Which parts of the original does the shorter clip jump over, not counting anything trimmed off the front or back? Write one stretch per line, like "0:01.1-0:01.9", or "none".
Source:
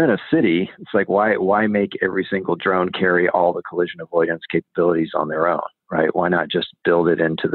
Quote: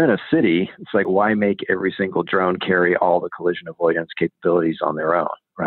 0:01.1-0:01.4